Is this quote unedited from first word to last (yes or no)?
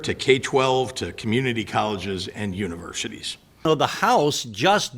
no